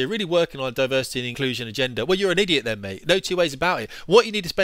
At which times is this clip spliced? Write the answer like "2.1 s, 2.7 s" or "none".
1.2 s